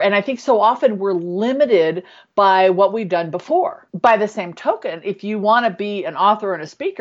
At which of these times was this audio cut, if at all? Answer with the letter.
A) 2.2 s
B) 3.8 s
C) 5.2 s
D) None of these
B